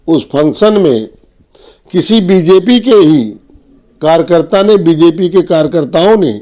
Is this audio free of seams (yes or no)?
yes